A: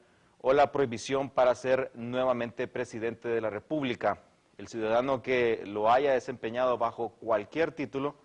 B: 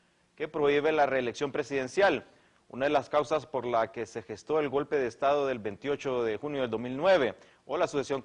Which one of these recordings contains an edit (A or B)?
A